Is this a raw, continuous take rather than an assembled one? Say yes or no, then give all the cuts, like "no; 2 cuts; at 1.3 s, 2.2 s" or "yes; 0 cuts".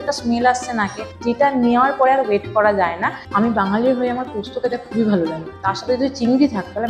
no; 2 cuts; at 3.2 s, 5.5 s